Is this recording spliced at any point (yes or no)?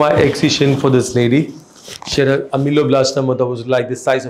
no